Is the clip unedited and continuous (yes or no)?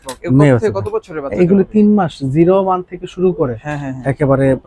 yes